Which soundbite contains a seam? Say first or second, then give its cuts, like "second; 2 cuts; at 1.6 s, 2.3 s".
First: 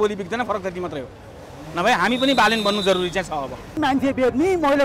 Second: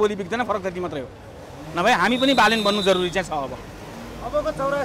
first; 1 cut; at 3.8 s